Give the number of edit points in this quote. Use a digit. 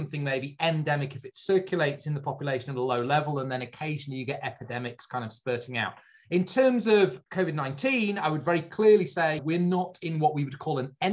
1